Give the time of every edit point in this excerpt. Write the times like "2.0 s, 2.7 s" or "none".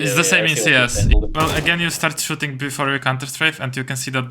1.1 s